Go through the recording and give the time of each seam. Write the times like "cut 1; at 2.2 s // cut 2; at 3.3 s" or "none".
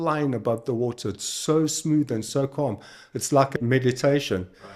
cut 1; at 3.5 s